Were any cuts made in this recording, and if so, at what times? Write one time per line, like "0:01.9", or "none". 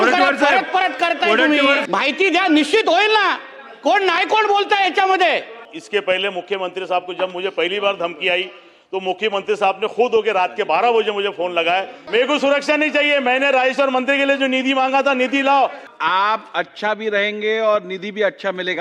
0:01.8
0:05.7
0:12.0
0:15.8